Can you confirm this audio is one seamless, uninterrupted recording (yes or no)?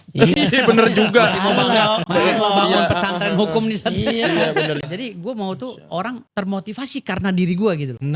no